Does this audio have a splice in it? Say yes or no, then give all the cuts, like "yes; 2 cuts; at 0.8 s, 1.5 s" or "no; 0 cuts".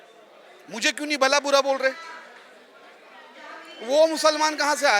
no; 0 cuts